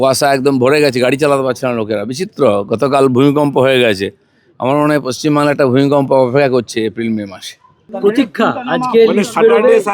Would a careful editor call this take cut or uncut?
cut